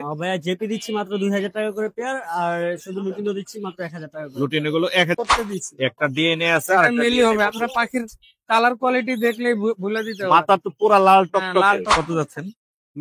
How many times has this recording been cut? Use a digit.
2